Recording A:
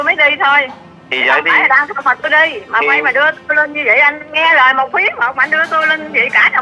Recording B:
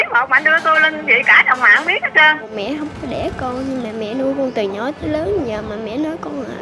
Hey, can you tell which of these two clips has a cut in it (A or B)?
B